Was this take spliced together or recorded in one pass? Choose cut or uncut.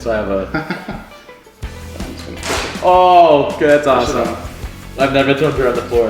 uncut